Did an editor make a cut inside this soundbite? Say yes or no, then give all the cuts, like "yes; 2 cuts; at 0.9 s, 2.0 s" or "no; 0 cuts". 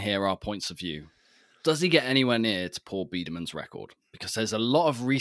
no; 0 cuts